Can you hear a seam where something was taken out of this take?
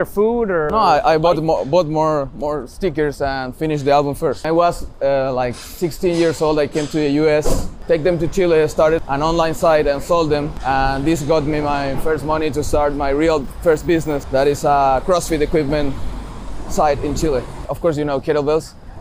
yes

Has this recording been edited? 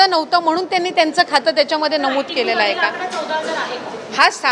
no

